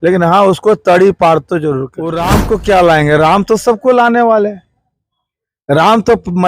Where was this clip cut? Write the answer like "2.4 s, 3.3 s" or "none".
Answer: 2.2 s